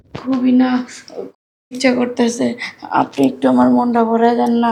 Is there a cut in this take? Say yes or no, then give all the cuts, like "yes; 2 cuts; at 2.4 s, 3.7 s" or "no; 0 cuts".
no; 0 cuts